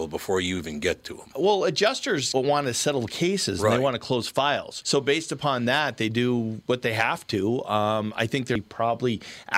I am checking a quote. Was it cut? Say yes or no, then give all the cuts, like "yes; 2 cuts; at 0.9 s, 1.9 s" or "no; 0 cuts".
yes; 1 cut; at 8.6 s